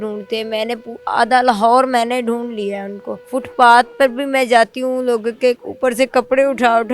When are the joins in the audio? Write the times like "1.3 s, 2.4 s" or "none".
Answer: 3.2 s, 5.7 s